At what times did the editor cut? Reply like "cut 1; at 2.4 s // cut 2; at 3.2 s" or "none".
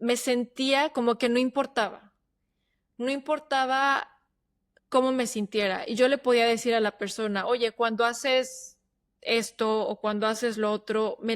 none